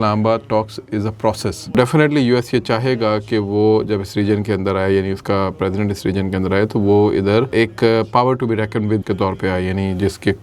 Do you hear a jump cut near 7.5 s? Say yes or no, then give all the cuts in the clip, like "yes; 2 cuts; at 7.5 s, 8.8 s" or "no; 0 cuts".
yes; 3 cuts; at 1.8 s, 7.5 s, 9.0 s